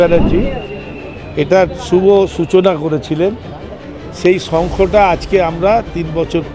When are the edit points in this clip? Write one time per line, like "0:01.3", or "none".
none